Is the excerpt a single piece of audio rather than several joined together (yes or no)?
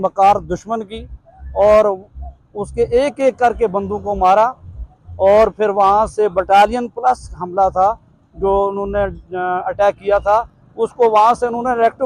yes